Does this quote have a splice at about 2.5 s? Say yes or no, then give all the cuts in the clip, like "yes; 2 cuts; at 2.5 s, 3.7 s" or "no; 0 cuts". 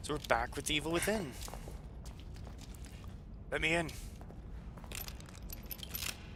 no; 0 cuts